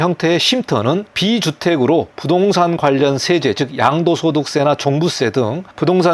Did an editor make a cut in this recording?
yes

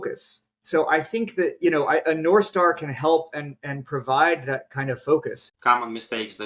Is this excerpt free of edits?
no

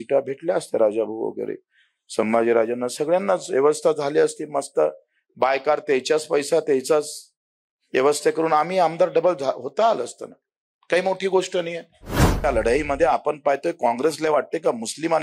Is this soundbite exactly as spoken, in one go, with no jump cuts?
no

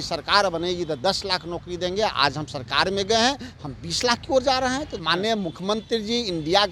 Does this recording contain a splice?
yes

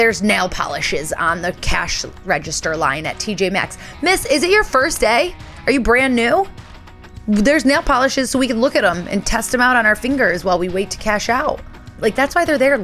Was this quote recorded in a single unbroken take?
no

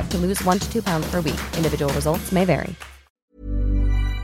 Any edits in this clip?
yes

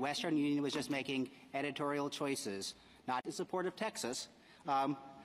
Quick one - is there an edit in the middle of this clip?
no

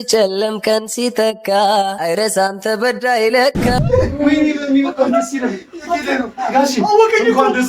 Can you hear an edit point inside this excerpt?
yes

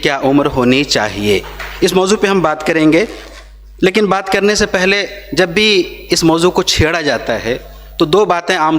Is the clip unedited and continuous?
yes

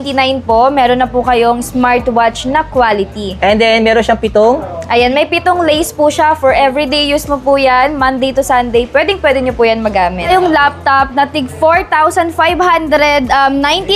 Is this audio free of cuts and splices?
no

